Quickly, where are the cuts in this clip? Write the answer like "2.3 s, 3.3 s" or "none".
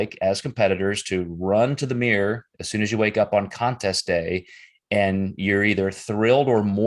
none